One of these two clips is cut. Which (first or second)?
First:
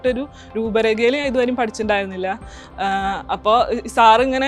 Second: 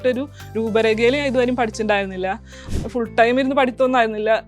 second